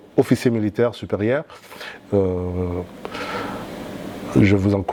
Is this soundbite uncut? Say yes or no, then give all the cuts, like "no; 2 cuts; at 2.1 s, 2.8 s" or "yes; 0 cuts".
yes; 0 cuts